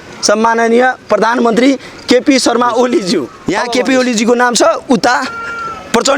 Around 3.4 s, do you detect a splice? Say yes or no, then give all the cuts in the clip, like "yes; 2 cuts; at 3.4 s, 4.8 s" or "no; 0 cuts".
yes; 1 cut; at 3.4 s